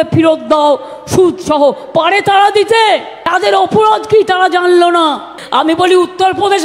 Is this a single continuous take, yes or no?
no